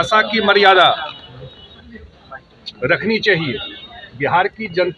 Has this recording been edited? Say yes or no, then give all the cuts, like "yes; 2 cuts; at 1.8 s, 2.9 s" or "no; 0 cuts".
no; 0 cuts